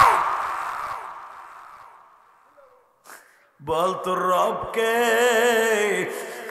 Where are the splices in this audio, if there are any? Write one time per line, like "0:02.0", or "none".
none